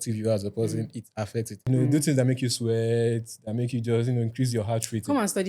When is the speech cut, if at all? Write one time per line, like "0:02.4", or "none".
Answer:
0:01.7